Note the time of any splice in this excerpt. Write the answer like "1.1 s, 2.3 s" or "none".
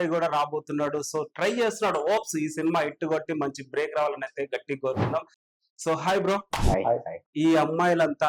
5.5 s, 7.2 s